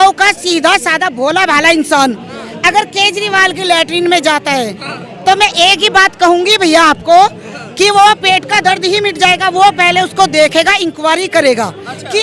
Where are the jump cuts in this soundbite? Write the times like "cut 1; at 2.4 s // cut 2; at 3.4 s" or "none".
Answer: none